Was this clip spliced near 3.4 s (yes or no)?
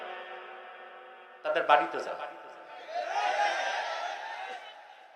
no